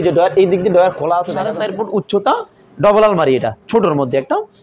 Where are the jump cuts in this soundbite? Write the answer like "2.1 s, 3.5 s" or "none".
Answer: 1.6 s